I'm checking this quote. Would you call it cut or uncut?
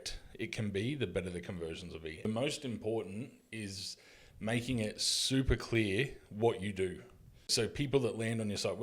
cut